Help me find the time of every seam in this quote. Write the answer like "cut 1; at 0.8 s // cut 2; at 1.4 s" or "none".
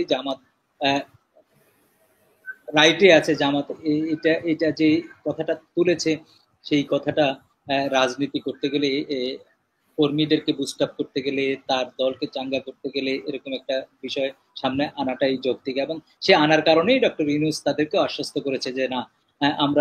none